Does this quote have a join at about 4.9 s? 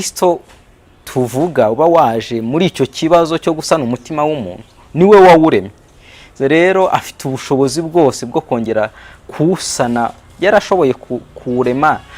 no; 0 cuts

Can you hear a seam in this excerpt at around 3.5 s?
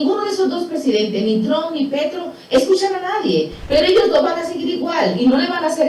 yes; 1 cut; at 3.5 s

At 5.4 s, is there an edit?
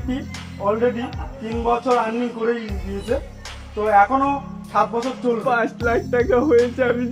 yes; 1 cut; at 5.4 s

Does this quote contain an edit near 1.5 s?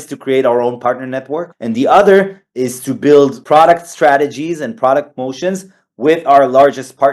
yes; 2 cuts; at 1.5 s, 3.4 s

